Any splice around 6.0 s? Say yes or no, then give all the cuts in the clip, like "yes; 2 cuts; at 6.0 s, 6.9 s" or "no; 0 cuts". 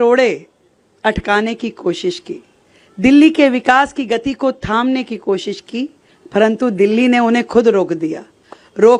yes; 1 cut; at 6.0 s